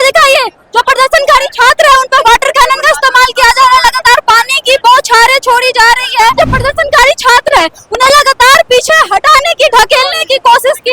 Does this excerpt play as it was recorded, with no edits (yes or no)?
no